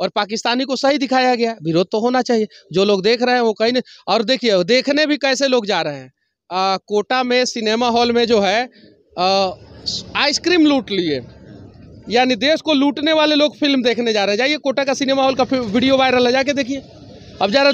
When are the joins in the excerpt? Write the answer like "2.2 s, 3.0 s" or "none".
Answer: none